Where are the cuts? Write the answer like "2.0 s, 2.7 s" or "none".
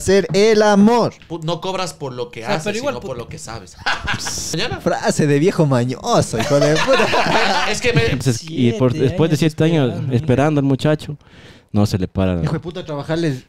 1.3 s, 4.6 s, 8.2 s